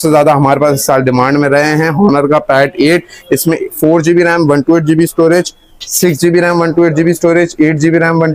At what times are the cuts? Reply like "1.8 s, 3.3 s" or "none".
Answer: none